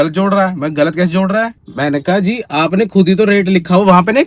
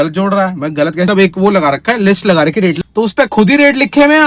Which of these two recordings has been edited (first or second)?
second